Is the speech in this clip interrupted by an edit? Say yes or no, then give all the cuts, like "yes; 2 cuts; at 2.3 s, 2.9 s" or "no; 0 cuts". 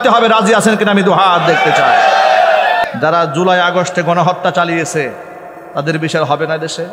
yes; 1 cut; at 2.8 s